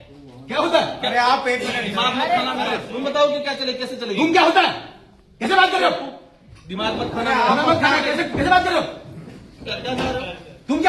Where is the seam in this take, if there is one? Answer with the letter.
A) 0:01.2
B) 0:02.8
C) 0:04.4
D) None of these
B